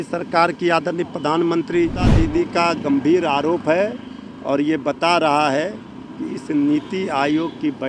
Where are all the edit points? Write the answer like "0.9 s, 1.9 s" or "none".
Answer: 2.1 s